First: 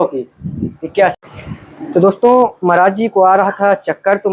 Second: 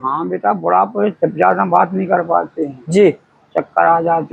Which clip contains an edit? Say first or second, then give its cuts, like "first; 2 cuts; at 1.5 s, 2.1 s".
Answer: first; 1 cut; at 1.2 s